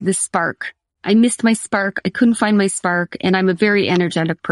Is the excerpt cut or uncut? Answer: uncut